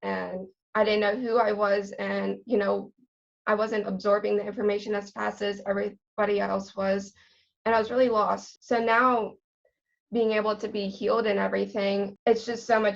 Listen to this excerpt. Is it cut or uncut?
uncut